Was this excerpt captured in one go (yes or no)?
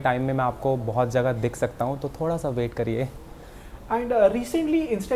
yes